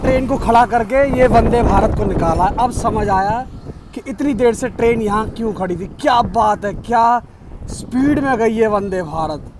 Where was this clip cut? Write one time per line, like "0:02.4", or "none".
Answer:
none

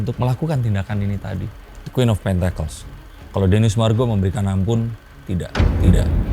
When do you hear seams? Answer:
0:01.5

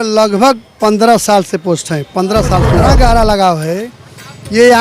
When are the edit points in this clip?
0:02.8

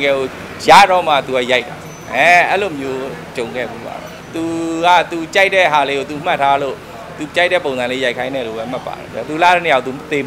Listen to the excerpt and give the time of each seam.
0:04.1
0:09.0

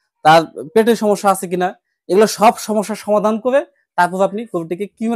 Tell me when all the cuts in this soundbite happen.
none

